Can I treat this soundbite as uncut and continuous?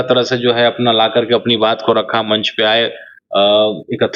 yes; 0 cuts

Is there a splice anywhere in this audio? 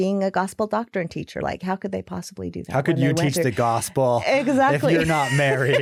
no; 0 cuts

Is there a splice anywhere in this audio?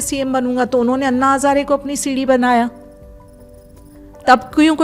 no; 0 cuts

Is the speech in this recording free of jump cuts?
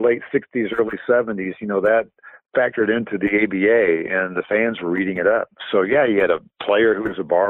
yes; 0 cuts

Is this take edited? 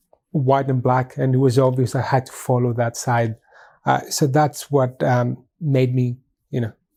no; 0 cuts

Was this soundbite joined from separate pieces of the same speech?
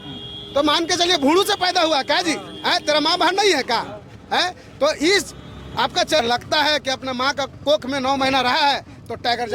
yes; 1 cut; at 6.2 s

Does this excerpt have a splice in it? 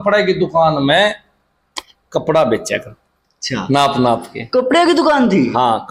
no; 0 cuts

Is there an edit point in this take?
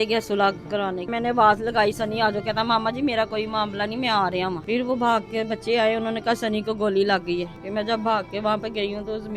yes; 3 cuts; at 1.1 s, 4.6 s, 7.6 s

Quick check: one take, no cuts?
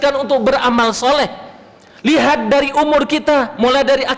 yes; 0 cuts

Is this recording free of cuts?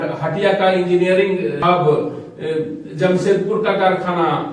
yes; 0 cuts

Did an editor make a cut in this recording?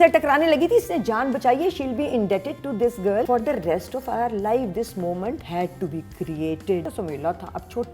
yes; 3 cuts; at 3.3 s, 5.4 s, 6.8 s

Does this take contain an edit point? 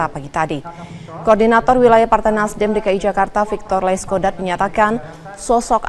yes; 1 cut; at 4.0 s

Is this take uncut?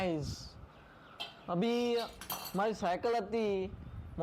yes; 0 cuts

